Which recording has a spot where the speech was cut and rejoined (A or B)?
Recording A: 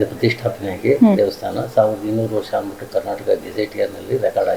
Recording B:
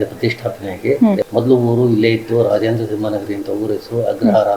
B